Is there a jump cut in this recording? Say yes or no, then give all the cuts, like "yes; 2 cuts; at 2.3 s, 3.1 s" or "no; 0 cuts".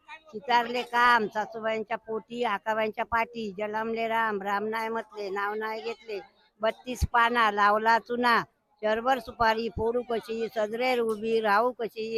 no; 0 cuts